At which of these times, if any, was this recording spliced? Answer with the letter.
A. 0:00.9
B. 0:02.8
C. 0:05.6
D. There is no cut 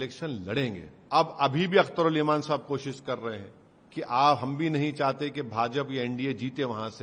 A